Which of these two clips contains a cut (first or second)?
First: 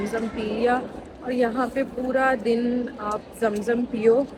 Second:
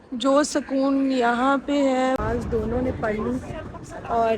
second